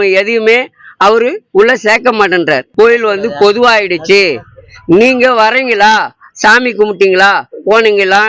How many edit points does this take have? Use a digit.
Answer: 1